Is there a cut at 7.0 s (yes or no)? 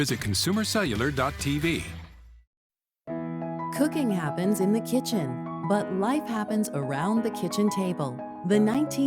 no